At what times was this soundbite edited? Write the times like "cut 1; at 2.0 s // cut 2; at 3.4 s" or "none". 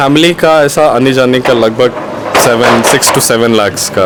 none